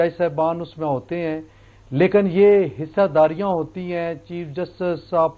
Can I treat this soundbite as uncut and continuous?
yes; 0 cuts

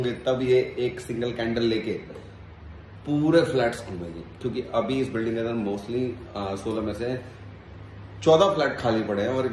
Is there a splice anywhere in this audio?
no; 0 cuts

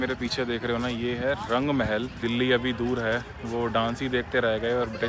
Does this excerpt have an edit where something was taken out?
yes; 1 cut; at 2.2 s

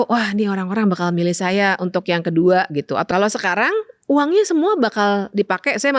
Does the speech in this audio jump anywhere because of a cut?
yes; 1 cut; at 3.1 s

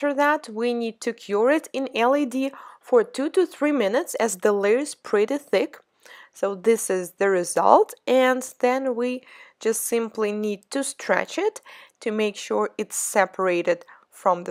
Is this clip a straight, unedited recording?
yes; 0 cuts

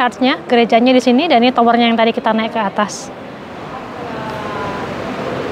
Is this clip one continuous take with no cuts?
yes; 0 cuts

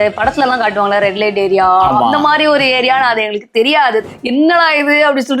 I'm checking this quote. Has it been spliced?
yes; 1 cut; at 4.1 s

